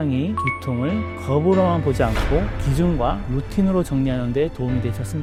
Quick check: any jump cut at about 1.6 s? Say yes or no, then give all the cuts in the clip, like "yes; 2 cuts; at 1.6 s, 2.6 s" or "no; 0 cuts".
no; 0 cuts